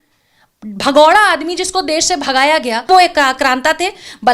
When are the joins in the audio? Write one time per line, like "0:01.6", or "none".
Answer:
0:02.9